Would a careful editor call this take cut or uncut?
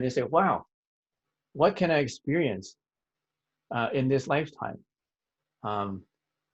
uncut